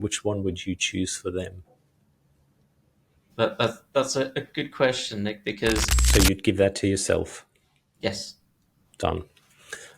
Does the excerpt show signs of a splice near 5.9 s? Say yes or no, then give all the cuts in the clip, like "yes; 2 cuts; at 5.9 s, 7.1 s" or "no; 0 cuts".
yes; 1 cut; at 5.9 s